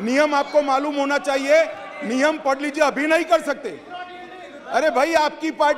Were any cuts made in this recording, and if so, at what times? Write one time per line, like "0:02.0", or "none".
none